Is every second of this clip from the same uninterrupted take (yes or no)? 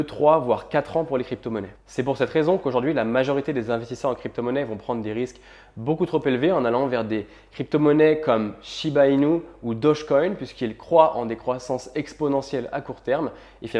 yes